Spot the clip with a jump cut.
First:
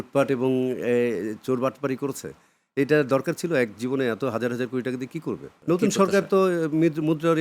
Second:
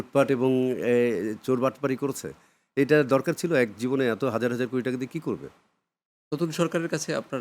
first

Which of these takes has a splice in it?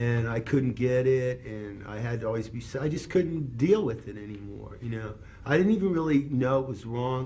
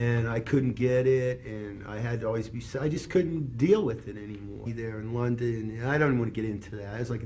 first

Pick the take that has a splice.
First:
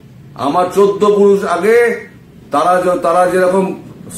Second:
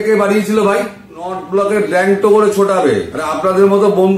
second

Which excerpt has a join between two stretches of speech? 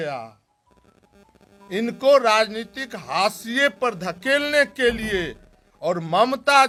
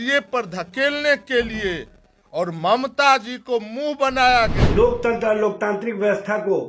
second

